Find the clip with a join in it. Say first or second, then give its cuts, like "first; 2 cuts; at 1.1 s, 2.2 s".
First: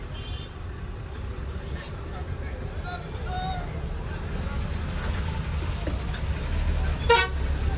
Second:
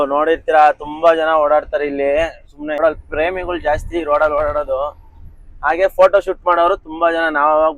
second; 1 cut; at 2.8 s